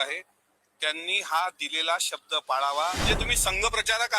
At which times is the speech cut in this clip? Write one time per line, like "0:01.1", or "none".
0:03.0